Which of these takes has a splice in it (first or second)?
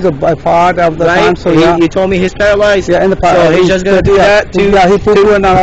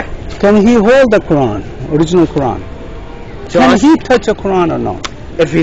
second